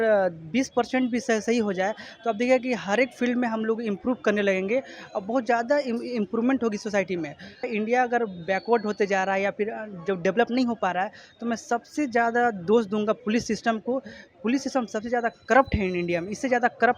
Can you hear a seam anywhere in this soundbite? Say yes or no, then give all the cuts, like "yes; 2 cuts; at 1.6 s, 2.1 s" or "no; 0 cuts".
yes; 1 cut; at 7.7 s